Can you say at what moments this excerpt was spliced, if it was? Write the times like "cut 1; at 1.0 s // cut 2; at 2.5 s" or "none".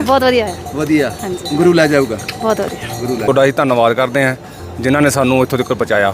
cut 1; at 3.3 s